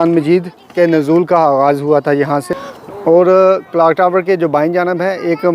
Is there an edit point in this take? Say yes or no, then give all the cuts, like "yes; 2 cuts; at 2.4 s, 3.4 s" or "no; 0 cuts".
yes; 1 cut; at 2.7 s